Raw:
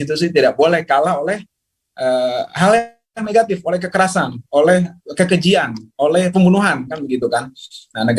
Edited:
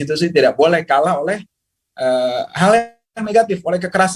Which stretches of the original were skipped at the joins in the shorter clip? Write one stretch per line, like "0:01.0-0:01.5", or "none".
none